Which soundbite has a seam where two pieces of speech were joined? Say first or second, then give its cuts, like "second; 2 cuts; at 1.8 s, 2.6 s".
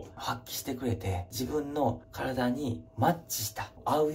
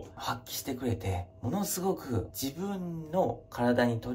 first; 1 cut; at 1.3 s